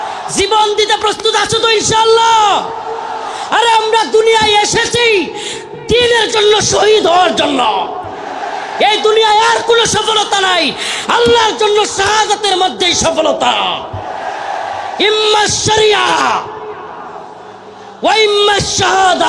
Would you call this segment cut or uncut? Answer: uncut